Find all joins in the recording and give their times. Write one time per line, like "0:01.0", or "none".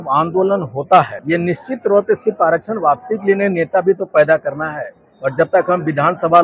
0:01.2